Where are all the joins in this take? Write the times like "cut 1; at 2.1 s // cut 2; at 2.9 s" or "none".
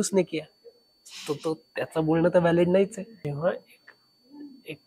cut 1; at 3.3 s